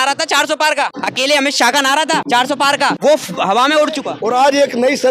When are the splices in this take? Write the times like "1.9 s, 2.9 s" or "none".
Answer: 0.9 s, 2.6 s, 4.1 s